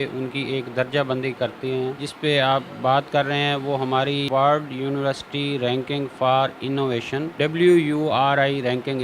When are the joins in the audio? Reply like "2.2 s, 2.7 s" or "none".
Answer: 2.0 s, 4.2 s, 7.3 s